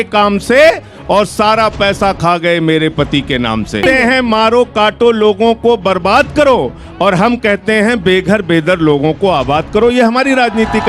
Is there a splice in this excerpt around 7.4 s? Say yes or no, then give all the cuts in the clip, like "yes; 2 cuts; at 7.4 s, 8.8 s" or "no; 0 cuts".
no; 1 cut; at 3.8 s